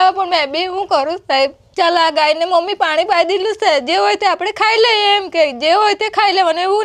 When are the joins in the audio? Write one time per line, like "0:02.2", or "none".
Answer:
0:01.6